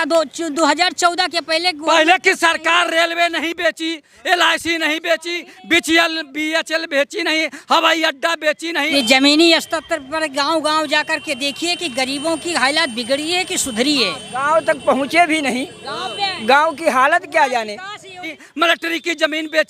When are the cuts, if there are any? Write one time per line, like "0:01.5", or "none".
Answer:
0:08.9
0:18.4